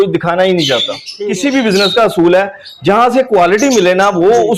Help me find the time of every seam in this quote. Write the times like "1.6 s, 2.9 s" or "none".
1.1 s